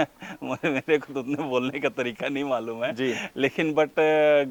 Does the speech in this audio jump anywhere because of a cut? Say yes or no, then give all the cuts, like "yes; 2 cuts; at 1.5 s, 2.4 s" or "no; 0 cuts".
no; 0 cuts